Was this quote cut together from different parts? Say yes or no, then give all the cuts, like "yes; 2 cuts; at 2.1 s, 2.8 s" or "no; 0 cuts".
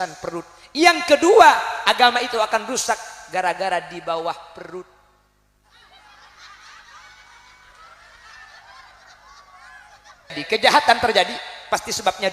yes; 1 cut; at 10.4 s